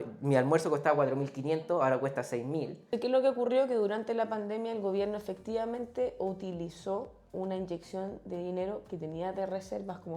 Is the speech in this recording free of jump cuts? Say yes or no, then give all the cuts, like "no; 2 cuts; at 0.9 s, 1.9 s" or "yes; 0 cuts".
no; 1 cut; at 2.9 s